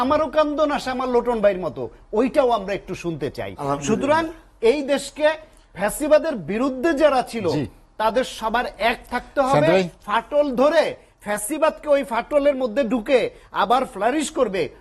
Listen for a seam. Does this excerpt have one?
no; 0 cuts

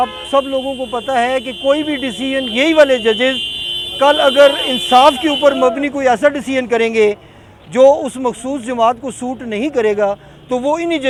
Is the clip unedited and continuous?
yes; 0 cuts

